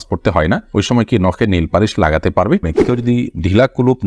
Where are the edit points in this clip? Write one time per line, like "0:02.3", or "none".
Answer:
0:02.8

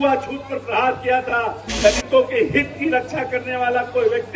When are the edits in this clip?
0:01.8

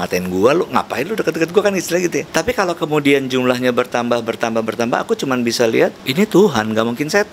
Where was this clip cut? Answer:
0:02.3
0:06.0

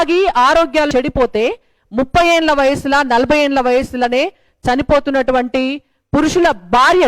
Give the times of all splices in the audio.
0:00.9

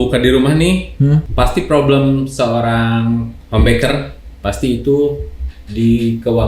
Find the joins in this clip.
0:01.3
0:03.4

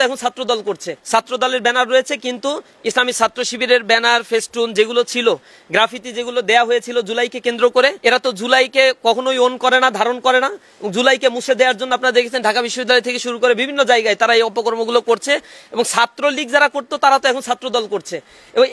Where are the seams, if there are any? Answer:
0:00.9
0:08.0

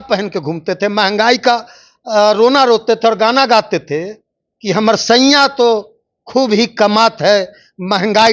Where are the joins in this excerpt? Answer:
none

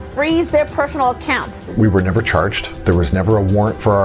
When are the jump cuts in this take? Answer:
0:01.6
0:02.7

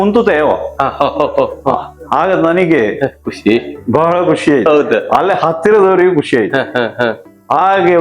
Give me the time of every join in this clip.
none

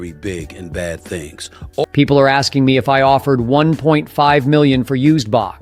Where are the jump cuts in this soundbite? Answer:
0:01.9

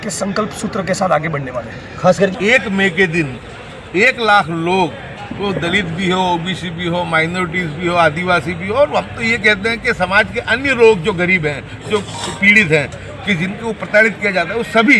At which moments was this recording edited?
0:02.3

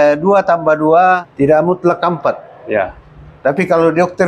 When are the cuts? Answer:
0:01.3

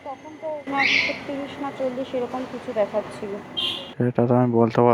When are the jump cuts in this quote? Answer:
none

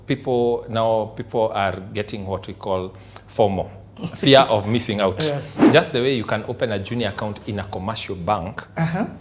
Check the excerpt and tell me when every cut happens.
0:05.6

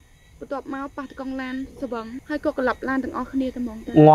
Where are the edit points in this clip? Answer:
0:02.2

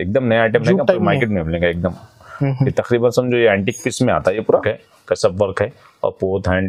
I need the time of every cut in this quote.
0:04.5

